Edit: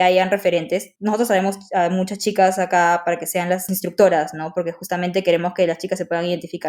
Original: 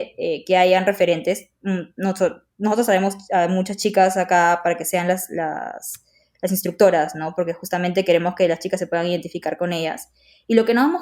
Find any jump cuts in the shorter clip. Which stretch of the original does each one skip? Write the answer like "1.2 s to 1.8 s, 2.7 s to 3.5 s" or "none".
1.5 s to 2.5 s, 5.3 s to 6.5 s